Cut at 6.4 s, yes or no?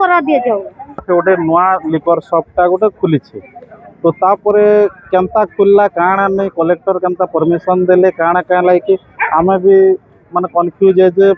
no